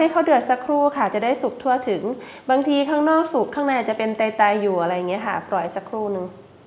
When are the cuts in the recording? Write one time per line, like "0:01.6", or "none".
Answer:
none